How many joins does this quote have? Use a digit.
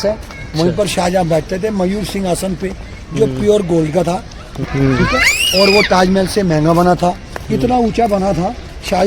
1